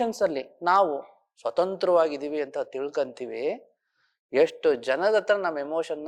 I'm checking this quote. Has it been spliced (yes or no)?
no